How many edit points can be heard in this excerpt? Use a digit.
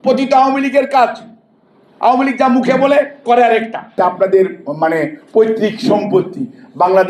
1